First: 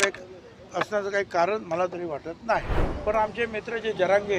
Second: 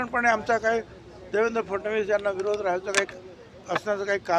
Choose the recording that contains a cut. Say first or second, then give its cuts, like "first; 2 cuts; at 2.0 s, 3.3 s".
first; 1 cut; at 2.8 s